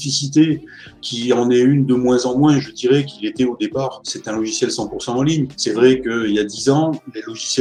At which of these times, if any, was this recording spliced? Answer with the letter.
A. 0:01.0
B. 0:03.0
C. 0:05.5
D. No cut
D